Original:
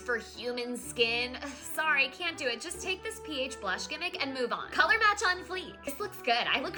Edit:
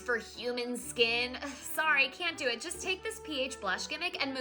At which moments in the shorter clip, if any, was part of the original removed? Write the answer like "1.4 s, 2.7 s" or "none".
none

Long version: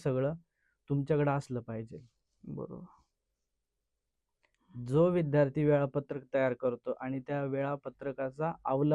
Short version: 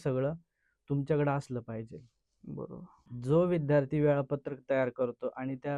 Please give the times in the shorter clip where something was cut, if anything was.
3.0 s

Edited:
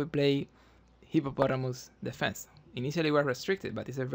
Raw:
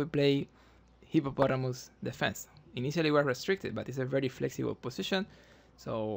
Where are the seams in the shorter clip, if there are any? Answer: none

